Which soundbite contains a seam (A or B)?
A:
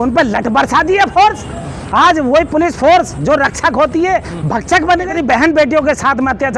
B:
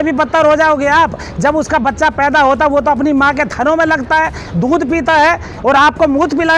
A